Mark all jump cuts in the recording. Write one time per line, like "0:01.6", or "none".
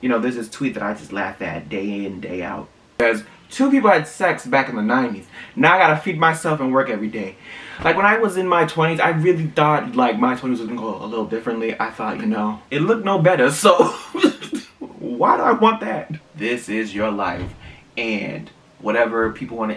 0:12.6
0:16.2